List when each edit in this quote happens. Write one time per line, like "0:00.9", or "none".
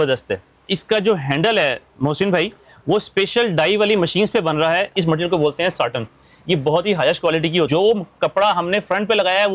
0:04.9
0:07.7

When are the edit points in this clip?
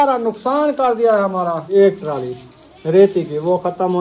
0:01.7

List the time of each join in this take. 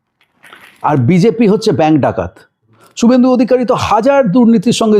0:02.8

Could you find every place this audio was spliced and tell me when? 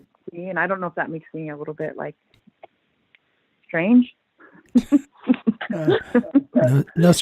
none

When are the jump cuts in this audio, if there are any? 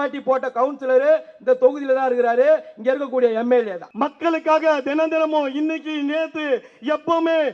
0:03.8

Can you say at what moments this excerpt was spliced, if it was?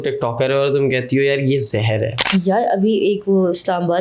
0:02.2

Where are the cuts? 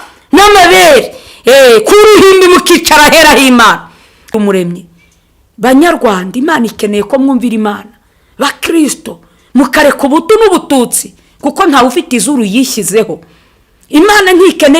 0:04.3

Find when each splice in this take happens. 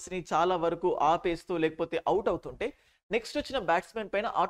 none

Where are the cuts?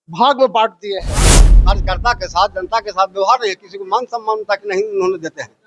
0:01.5

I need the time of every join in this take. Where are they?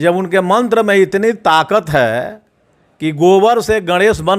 none

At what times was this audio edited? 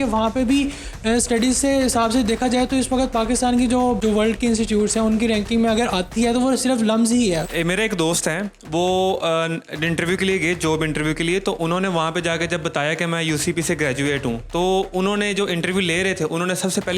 0:04.0
0:07.5

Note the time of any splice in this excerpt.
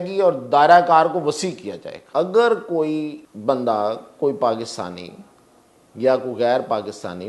0:01.9
0:03.2

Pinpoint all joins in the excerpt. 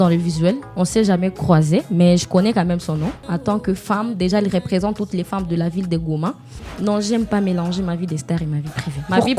0:03.2
0:06.6

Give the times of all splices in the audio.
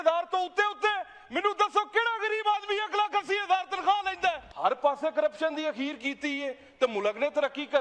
0:04.5

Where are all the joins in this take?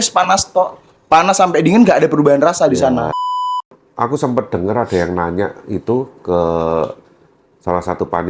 0:03.6

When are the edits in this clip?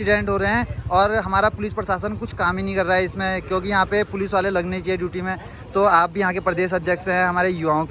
none

